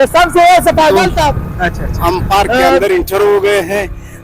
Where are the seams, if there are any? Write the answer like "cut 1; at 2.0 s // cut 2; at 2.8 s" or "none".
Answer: cut 1; at 1.9 s